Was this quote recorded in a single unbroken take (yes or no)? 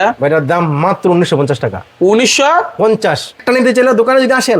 no